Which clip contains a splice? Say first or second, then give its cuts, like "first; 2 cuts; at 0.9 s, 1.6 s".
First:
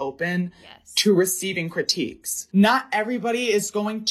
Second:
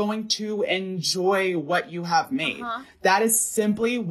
first; 1 cut; at 2.3 s